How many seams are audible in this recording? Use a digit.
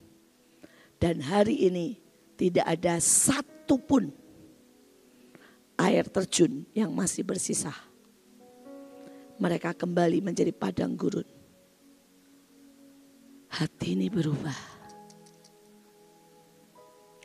0